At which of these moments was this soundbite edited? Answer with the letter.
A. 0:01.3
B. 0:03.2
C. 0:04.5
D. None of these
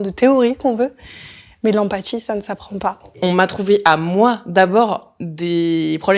B